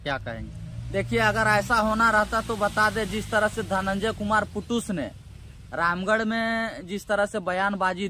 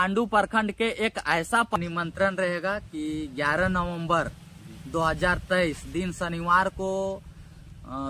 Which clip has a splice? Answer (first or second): second